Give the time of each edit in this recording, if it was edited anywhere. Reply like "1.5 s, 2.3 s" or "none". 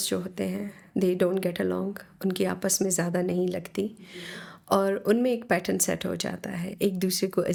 none